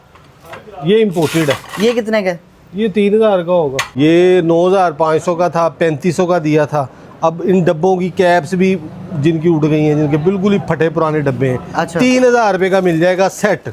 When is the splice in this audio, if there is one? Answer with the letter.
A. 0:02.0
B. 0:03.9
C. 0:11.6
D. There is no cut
B